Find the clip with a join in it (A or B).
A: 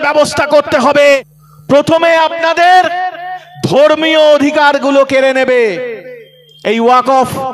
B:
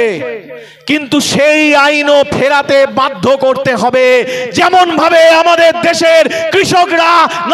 A